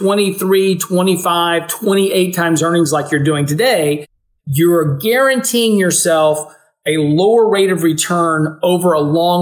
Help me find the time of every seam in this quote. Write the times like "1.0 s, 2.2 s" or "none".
none